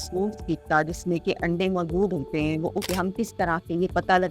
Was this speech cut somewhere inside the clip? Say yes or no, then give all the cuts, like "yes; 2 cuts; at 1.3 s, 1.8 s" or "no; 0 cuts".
yes; 1 cut; at 2.9 s